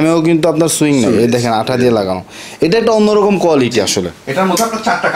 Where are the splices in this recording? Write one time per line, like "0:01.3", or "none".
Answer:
none